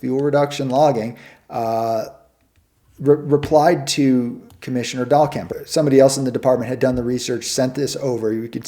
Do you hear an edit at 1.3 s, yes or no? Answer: no